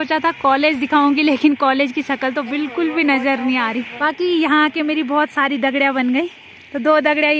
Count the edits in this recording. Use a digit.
1